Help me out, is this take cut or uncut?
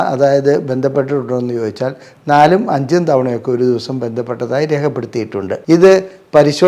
cut